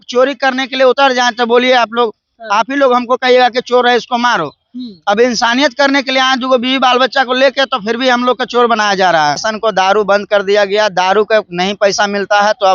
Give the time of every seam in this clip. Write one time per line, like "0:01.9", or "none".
0:09.5